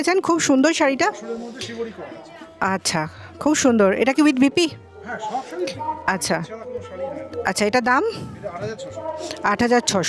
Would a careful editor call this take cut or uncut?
uncut